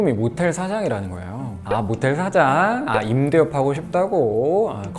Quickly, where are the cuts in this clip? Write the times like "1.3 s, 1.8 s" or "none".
1.6 s